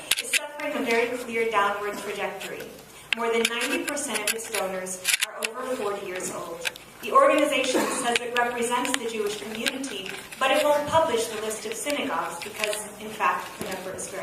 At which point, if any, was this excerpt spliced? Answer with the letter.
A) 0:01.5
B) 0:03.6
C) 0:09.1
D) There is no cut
B